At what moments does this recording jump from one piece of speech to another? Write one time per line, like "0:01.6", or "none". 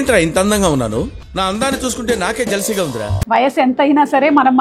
0:03.1